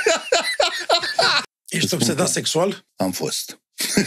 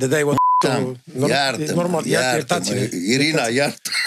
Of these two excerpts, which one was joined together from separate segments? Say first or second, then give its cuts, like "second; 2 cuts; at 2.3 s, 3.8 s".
first; 2 cuts; at 1.4 s, 2.8 s